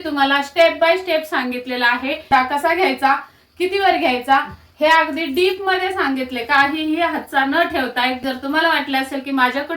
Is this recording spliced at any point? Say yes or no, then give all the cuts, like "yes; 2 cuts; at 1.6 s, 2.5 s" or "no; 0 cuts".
yes; 2 cuts; at 2.3 s, 8.2 s